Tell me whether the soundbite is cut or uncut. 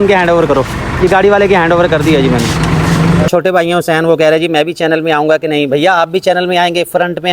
cut